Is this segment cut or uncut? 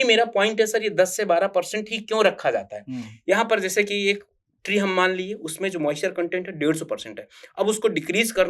uncut